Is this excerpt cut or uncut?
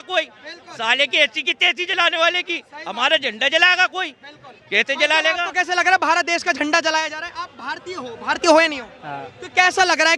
uncut